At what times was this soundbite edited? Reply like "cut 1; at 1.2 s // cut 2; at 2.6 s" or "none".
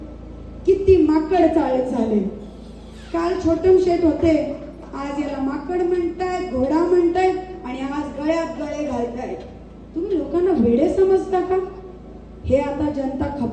none